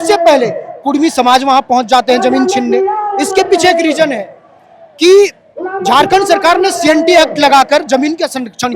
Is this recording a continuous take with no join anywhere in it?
yes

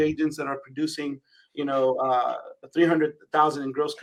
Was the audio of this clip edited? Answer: no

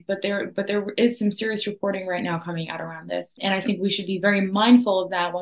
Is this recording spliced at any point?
yes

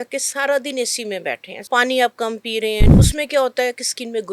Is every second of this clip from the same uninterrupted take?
no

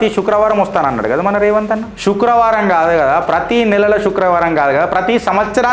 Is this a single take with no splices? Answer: no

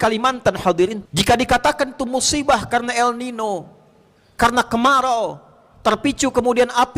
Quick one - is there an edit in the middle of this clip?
yes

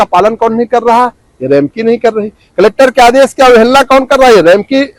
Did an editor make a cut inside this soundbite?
no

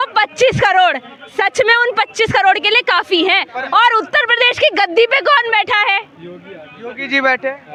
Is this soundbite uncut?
yes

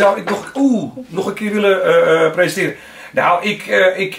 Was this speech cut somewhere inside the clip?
no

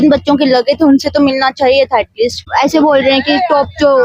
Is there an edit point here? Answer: yes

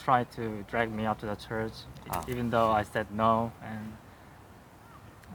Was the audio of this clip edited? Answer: no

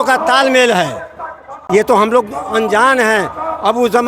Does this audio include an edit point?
yes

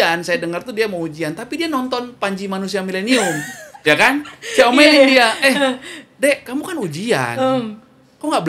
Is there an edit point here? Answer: no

